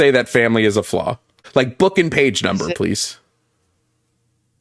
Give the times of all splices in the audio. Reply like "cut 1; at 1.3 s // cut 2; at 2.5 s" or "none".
cut 1; at 1.4 s